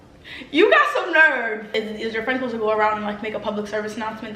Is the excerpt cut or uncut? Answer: cut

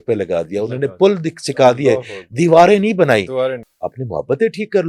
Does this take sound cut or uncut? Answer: cut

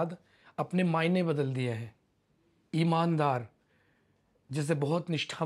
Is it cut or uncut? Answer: uncut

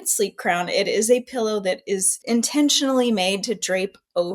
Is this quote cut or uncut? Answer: cut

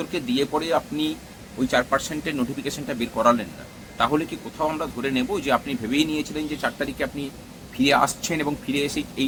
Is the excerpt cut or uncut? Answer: uncut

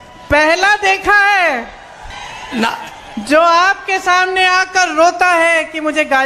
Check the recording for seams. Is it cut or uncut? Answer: cut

